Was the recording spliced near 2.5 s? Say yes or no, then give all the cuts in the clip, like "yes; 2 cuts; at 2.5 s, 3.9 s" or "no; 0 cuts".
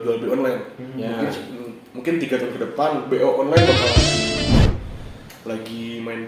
no; 1 cut; at 4.7 s